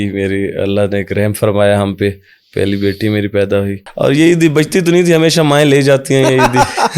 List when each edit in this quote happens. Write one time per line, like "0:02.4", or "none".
0:03.8